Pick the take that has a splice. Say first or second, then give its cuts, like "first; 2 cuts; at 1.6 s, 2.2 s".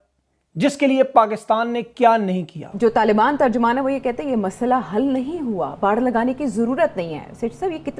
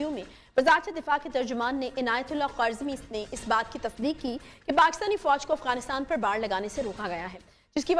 first; 1 cut; at 2.6 s